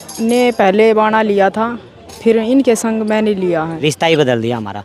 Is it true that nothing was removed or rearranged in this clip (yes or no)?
no